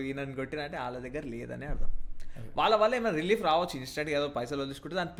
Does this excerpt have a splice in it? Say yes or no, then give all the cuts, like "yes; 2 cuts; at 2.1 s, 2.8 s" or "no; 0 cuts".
no; 0 cuts